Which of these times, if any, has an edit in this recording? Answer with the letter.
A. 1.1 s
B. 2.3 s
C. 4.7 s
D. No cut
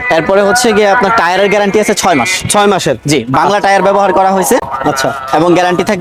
D